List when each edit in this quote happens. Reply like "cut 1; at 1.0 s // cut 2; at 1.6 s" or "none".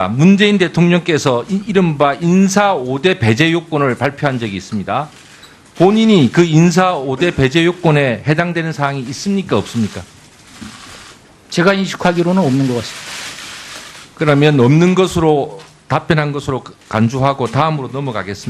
cut 1; at 17.5 s